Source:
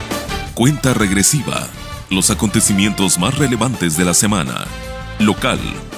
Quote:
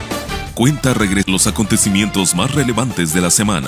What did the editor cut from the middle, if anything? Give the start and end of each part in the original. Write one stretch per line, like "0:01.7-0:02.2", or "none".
0:01.3-0:02.1

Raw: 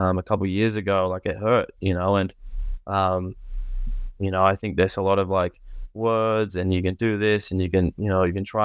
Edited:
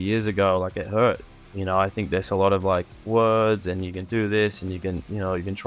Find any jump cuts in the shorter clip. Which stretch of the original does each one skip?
0:01.7-0:03.9
0:05.6-0:05.8

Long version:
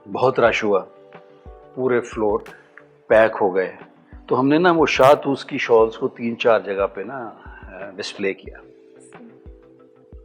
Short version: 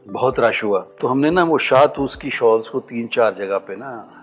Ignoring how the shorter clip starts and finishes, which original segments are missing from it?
0:00.9-0:04.2

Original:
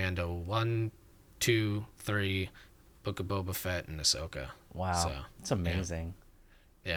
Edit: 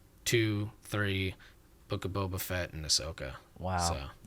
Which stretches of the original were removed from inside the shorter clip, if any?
none

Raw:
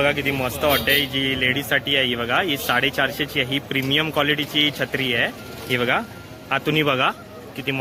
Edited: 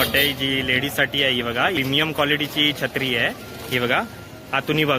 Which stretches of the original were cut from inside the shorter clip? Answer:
0:02.5-0:03.8

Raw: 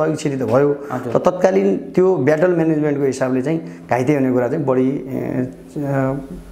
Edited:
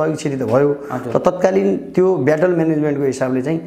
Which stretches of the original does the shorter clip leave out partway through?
none

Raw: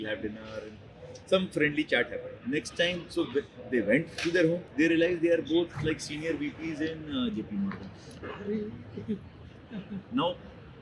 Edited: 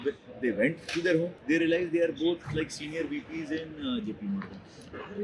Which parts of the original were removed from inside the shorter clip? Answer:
none

